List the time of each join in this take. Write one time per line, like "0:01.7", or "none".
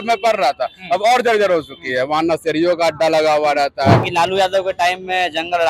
0:04.1